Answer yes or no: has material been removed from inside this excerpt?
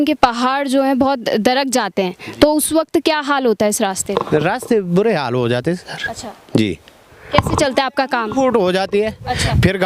no